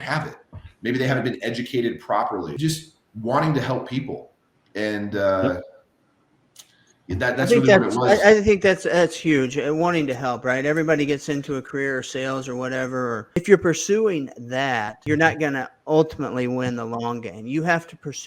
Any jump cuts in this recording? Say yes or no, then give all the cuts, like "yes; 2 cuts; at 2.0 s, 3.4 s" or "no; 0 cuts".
yes; 3 cuts; at 2.5 s, 13.4 s, 14.9 s